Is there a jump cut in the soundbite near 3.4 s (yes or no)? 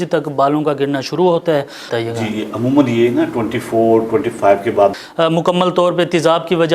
no